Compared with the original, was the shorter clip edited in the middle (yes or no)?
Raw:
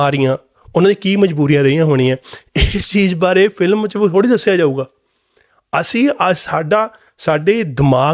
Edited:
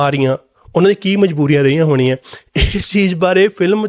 no